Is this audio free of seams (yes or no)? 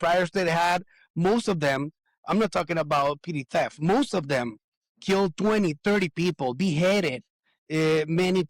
yes